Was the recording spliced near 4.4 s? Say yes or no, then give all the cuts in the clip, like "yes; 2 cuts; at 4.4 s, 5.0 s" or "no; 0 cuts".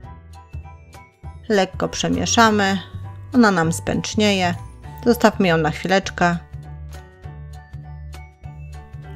no; 1 cut; at 1.1 s